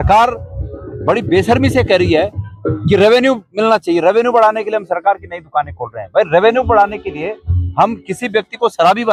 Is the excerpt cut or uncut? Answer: uncut